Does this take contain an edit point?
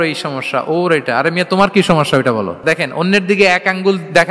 yes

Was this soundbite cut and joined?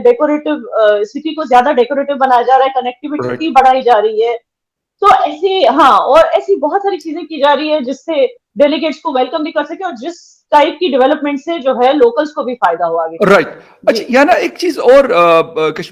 no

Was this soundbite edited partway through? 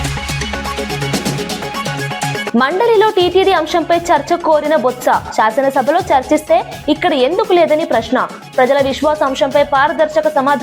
yes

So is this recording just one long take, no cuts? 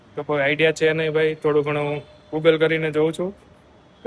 yes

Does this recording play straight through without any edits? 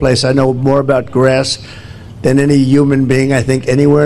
yes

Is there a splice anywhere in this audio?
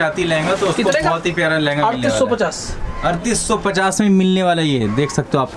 no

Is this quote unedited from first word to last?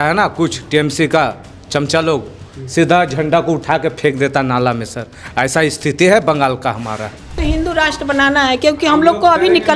no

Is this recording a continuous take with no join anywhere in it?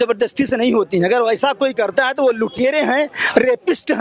yes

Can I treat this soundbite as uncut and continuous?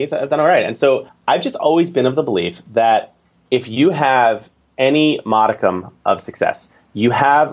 no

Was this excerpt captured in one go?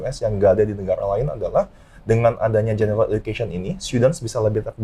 yes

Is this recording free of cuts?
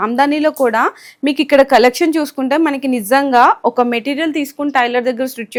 yes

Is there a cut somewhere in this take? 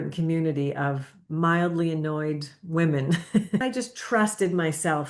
yes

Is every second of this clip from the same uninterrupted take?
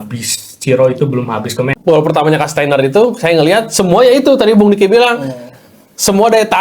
no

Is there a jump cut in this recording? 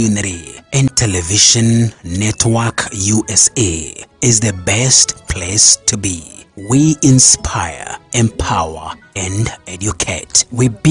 yes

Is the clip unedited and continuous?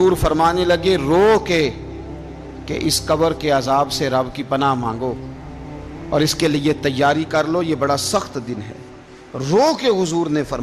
yes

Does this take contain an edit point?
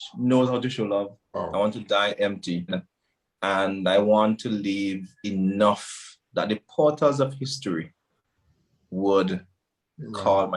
yes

